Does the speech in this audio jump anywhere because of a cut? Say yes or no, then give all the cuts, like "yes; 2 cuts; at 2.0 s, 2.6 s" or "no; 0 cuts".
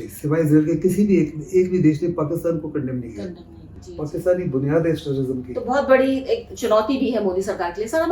no; 0 cuts